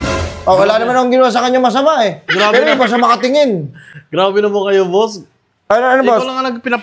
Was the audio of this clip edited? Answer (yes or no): no